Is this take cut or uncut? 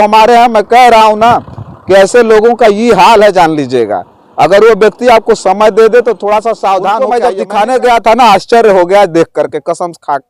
cut